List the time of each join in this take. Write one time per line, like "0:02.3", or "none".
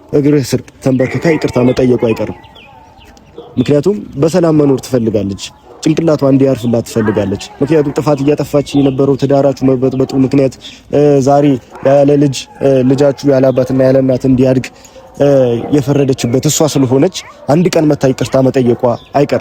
none

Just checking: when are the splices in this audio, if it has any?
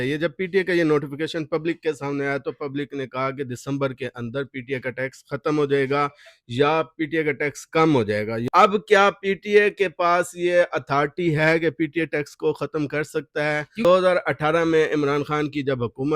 0:08.5
0:13.8

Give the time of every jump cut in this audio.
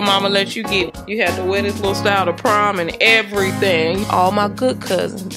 0:01.0
0:04.1

